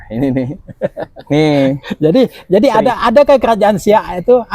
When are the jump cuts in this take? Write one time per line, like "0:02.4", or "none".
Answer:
none